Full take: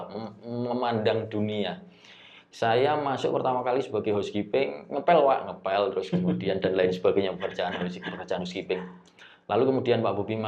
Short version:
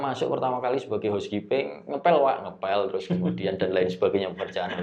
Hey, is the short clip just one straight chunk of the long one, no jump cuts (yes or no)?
yes